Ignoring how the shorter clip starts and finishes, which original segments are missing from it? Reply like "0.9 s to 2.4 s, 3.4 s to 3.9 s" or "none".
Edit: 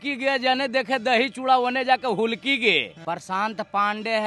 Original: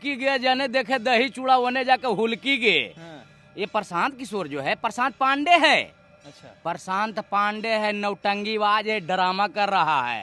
2.9 s to 6.5 s